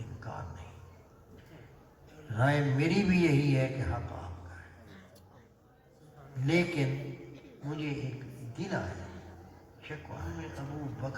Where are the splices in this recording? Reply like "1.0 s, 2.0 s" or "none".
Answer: 10.3 s